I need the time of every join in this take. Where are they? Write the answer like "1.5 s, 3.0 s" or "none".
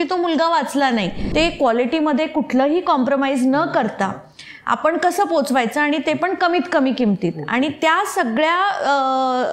1.2 s